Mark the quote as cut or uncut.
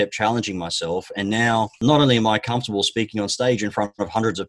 cut